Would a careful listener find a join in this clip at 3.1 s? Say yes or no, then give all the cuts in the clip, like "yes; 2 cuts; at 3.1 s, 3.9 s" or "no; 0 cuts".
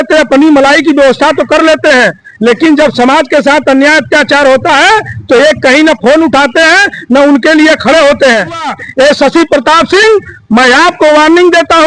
no; 1 cut; at 8.7 s